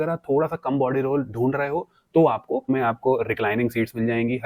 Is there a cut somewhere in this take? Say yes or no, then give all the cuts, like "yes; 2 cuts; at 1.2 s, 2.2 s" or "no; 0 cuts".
yes; 1 cut; at 2.7 s